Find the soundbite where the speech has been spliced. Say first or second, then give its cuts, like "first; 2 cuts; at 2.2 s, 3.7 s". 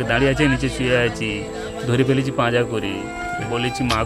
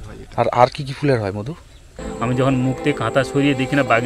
second; 1 cut; at 1.9 s